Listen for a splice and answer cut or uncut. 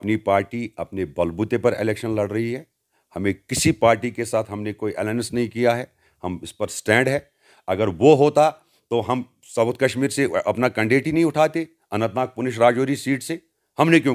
uncut